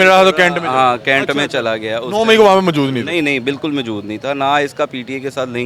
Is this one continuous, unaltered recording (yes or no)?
yes